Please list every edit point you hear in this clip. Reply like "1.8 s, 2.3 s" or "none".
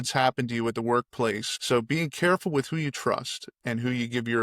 1.5 s